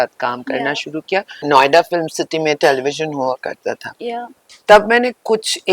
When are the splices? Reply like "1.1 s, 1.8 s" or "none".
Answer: 1.3 s